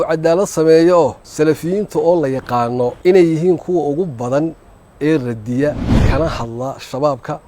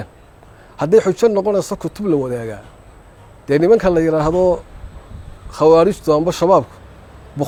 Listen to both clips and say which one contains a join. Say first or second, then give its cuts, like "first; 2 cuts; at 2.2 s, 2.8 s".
first; 3 cuts; at 1.2 s, 3.0 s, 5.9 s